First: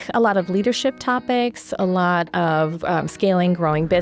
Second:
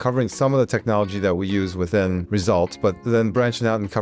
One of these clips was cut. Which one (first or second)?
second